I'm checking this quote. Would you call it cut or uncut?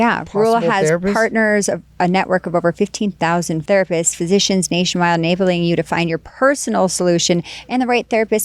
uncut